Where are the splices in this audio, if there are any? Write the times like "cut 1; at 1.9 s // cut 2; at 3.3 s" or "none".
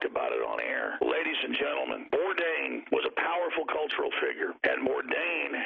cut 1; at 0.9 s // cut 2; at 2.0 s // cut 3; at 2.8 s // cut 4; at 4.6 s